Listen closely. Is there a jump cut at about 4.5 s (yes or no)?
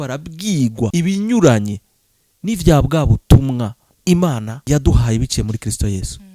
yes